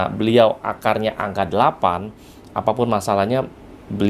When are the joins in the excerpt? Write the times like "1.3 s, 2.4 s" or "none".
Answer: none